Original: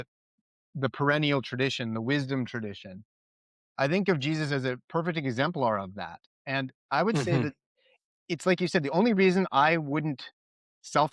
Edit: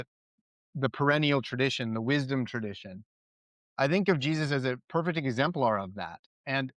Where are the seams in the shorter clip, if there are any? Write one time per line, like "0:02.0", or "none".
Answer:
none